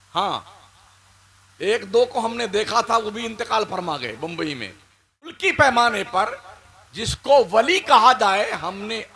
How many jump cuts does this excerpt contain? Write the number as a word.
one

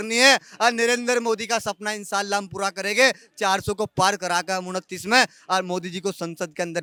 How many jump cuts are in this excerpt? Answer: zero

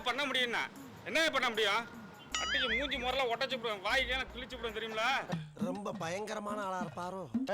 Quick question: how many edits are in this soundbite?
zero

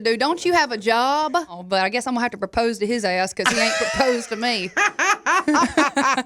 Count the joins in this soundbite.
one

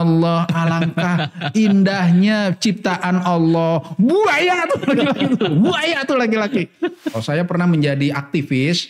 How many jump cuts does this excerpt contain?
one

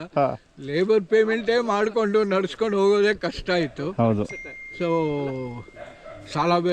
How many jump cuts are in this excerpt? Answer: zero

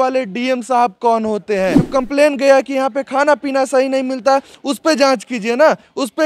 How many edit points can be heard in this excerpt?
one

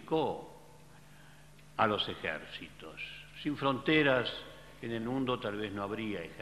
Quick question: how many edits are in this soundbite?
one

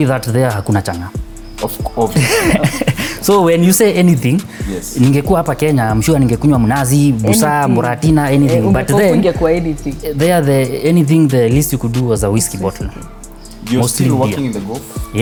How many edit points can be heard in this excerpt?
zero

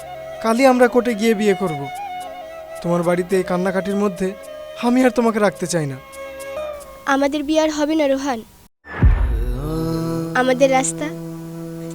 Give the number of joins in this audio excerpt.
one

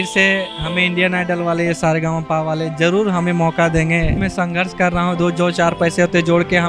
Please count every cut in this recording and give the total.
one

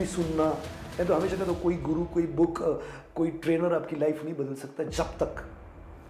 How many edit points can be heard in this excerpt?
zero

